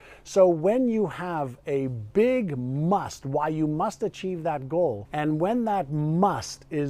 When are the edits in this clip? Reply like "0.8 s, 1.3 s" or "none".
5.0 s